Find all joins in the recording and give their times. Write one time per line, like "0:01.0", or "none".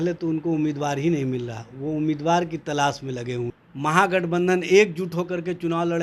0:03.6